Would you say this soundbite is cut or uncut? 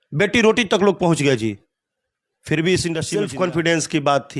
cut